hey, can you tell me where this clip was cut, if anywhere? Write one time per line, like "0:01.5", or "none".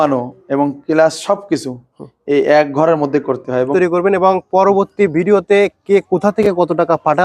0:03.6